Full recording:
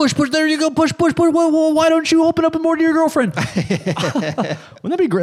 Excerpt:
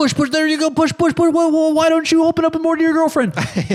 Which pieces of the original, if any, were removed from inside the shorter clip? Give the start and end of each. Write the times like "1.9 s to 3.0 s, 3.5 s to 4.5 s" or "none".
none